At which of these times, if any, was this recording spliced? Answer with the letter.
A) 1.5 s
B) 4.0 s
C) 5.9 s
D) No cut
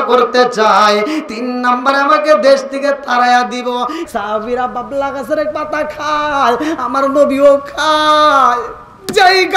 B